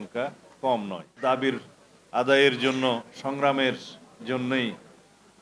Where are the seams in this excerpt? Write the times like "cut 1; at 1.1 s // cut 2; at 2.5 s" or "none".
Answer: cut 1; at 1.1 s